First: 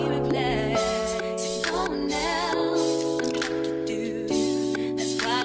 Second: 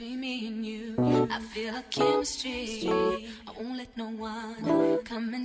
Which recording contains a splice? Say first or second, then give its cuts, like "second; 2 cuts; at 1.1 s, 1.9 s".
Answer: second; 1 cut; at 2.7 s